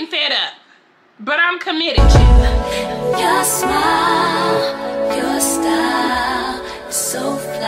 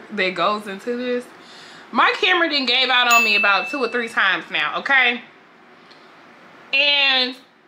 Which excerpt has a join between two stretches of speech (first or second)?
first